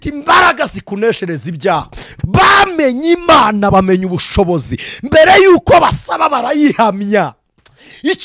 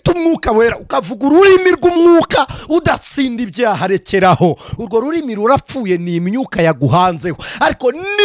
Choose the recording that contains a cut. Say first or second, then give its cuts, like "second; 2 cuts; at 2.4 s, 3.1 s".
first; 1 cut; at 2.1 s